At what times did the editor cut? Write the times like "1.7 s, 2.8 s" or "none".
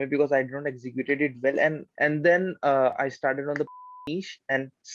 1.9 s

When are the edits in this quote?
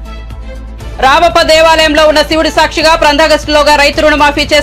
none

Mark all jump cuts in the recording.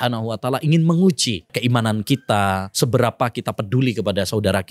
1.5 s, 2.7 s

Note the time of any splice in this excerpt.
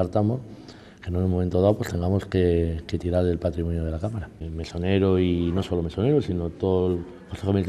4.3 s

